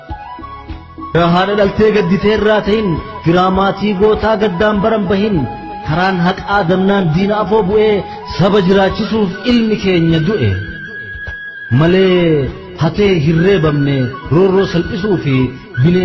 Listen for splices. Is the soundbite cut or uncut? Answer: cut